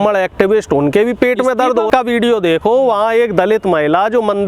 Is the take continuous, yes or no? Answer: no